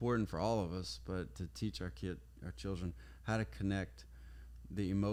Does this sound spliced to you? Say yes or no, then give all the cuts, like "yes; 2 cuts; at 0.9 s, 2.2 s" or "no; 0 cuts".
no; 0 cuts